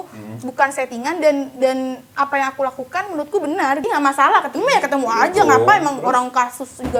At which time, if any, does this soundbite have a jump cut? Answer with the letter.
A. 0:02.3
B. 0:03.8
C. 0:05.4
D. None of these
B